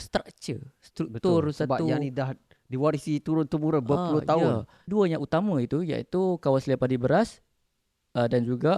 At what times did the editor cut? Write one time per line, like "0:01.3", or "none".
0:04.9